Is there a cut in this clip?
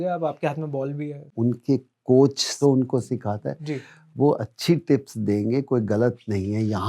yes; 2 cuts; at 1.2 s, 2.6 s

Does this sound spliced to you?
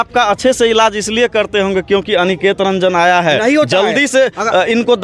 no; 0 cuts

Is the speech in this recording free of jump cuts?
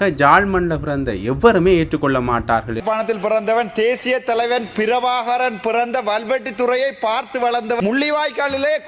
no; 2 cuts; at 2.8 s, 7.8 s

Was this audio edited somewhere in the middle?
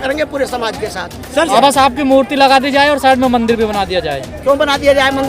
yes; 1 cut; at 1.5 s

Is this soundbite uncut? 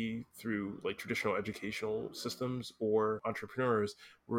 no; 1 cut; at 3.2 s

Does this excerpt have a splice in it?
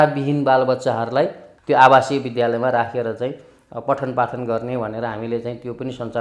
yes; 1 cut; at 1.5 s

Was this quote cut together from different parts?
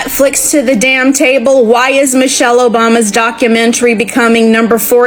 no; 0 cuts

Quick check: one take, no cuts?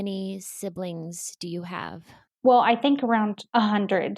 no; 1 cut; at 2.2 s

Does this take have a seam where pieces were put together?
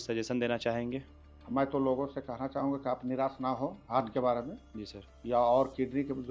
no; 0 cuts

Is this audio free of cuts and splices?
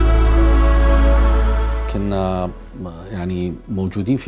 no; 1 cut; at 1.6 s

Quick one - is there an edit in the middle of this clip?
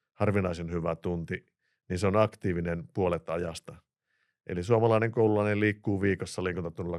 no; 0 cuts

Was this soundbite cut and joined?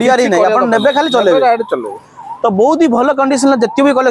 no; 0 cuts

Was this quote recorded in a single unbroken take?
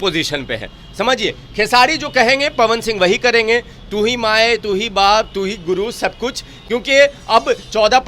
yes; 0 cuts

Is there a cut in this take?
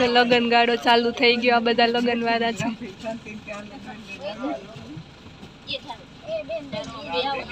no; 0 cuts

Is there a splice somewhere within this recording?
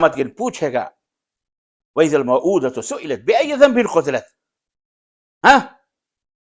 no; 0 cuts

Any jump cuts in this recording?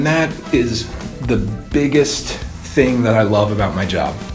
no; 0 cuts

